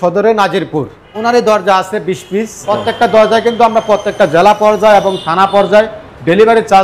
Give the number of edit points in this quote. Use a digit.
2